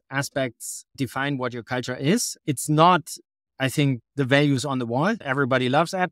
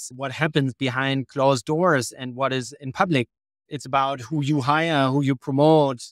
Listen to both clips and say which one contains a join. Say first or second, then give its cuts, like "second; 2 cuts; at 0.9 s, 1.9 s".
first; 2 cuts; at 1.0 s, 2.3 s